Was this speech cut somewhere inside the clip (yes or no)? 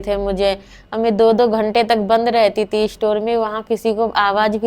no